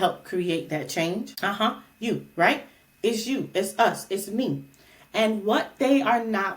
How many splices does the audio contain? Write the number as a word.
one